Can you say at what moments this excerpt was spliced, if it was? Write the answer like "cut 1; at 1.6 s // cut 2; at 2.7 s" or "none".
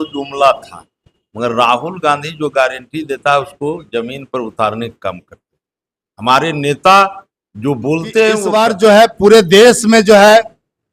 cut 1; at 8.5 s